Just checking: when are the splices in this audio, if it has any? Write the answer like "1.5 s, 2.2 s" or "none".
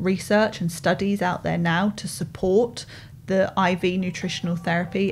none